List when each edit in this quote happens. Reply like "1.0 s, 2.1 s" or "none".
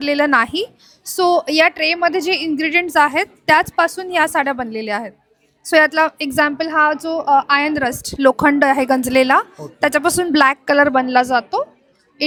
none